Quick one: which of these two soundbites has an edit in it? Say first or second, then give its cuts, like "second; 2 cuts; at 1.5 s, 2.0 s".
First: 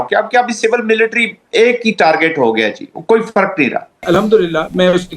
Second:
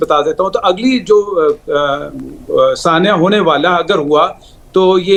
first; 1 cut; at 4.0 s